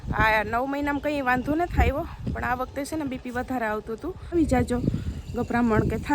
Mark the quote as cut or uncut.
cut